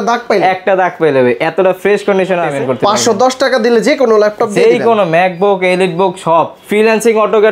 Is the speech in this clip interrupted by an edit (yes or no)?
yes